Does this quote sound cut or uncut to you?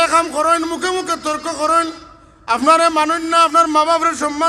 uncut